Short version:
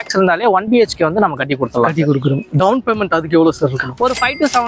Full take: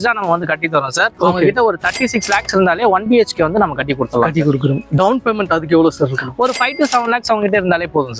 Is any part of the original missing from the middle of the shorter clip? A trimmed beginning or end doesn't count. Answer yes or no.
no